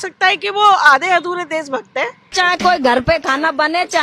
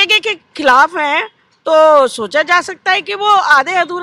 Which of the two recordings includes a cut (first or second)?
first